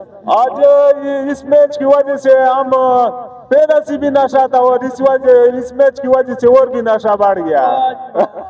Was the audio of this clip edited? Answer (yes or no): no